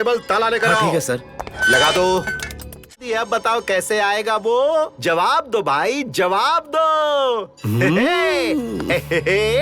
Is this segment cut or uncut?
cut